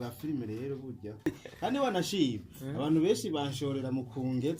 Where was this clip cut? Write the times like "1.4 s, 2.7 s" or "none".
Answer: 1.3 s